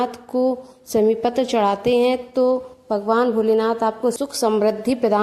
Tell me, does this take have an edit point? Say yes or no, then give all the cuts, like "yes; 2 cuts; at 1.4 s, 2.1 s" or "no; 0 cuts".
yes; 1 cut; at 4.2 s